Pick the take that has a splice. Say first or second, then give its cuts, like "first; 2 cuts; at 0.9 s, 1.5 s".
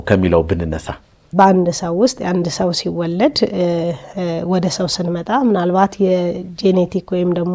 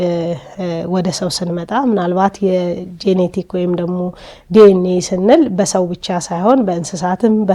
first; 1 cut; at 1.2 s